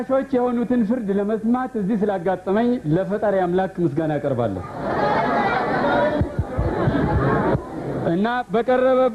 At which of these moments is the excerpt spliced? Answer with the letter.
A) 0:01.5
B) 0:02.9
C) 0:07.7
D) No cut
D